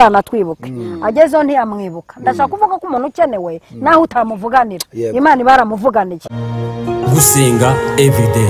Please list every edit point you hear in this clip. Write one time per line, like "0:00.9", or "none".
0:06.2